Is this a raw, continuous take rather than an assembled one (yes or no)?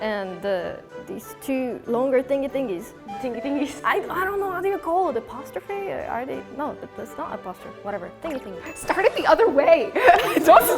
no